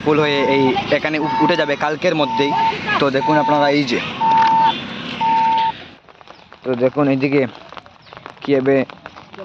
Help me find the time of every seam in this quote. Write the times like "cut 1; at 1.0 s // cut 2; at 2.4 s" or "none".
cut 1; at 5.8 s